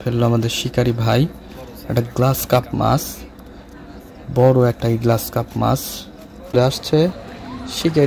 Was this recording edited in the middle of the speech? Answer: yes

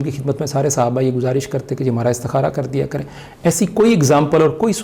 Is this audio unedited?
yes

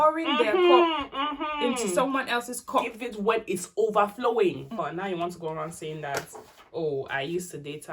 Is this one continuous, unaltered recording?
no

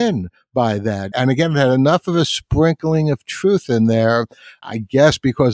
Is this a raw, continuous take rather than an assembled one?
no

